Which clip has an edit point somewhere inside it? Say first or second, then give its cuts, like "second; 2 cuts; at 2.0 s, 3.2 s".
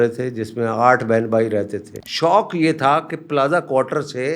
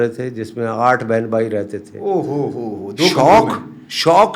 first; 1 cut; at 1.9 s